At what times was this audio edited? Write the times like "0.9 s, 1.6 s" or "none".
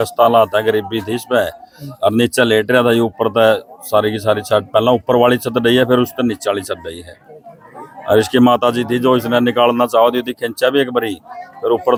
none